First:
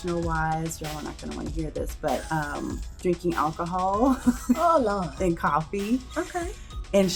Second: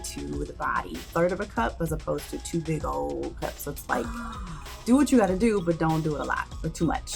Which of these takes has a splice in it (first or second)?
second